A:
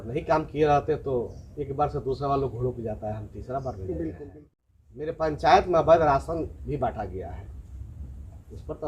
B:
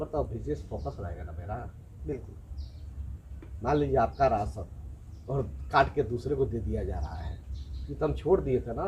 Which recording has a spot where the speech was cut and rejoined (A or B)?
A